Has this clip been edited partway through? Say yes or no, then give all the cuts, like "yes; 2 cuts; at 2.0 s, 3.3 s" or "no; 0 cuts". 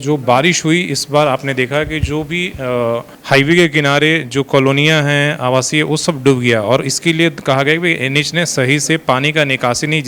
no; 0 cuts